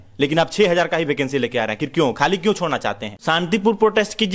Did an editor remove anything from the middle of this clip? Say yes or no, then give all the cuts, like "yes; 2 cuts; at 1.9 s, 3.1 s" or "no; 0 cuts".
yes; 1 cut; at 3.2 s